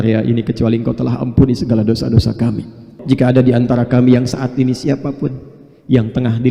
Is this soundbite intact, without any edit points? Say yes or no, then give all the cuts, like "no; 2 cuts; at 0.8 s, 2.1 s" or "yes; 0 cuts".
no; 1 cut; at 2.9 s